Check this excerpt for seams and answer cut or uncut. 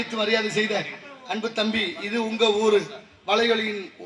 uncut